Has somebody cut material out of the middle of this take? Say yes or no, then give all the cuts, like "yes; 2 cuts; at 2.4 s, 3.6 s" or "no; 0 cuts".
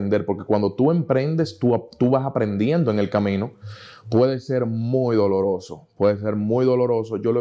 no; 0 cuts